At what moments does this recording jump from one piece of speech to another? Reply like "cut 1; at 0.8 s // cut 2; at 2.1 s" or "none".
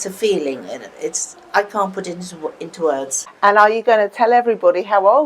cut 1; at 3.2 s